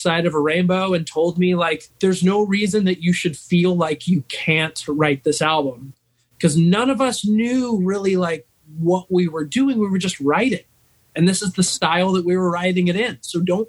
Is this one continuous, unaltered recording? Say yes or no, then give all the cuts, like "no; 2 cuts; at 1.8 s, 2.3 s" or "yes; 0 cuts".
no; 1 cut; at 1.9 s